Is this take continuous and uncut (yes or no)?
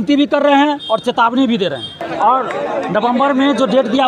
no